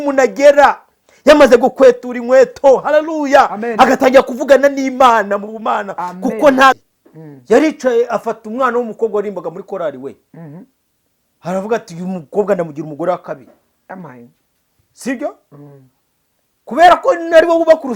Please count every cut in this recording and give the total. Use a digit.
1